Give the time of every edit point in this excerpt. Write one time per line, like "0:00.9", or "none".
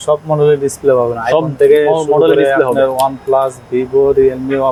none